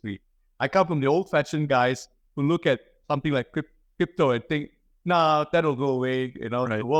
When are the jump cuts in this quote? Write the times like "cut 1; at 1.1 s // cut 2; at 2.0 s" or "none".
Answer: none